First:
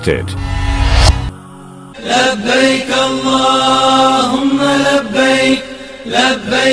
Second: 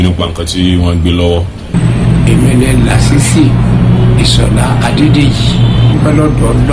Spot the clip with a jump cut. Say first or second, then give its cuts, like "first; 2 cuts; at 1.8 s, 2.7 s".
first; 1 cut; at 1.9 s